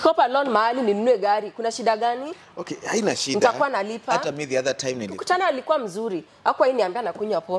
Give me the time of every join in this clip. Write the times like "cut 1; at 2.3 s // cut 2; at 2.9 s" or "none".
cut 1; at 5.2 s

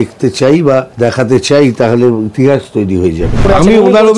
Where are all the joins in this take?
cut 1; at 0.9 s // cut 2; at 3.4 s

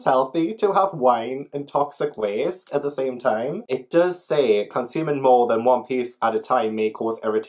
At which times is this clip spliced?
none

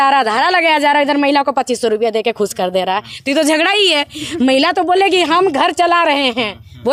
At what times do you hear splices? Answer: none

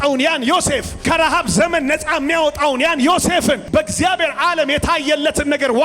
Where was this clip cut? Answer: cut 1; at 0.9 s // cut 2; at 3.6 s

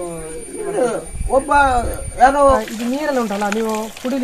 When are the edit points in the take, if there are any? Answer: cut 1; at 2.6 s

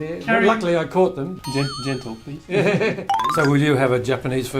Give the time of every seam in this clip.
cut 1; at 1.3 s // cut 2; at 3.2 s

